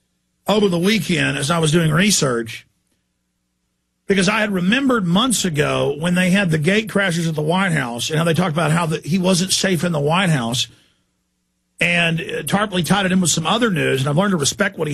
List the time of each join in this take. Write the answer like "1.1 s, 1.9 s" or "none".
none